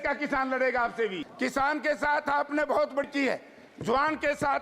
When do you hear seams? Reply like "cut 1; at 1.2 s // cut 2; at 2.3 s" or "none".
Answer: cut 1; at 1.2 s